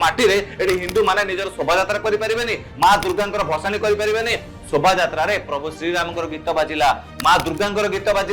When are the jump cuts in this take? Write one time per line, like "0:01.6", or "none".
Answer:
0:04.5